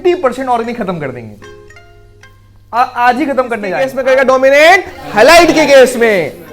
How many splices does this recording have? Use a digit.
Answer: 1